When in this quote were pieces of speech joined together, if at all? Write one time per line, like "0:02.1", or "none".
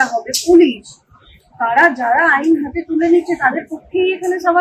none